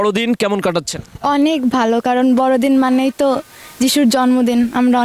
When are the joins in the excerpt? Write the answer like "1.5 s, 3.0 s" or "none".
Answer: none